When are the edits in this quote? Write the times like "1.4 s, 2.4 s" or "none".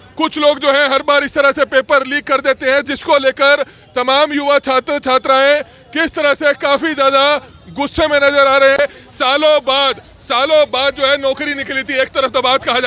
8.8 s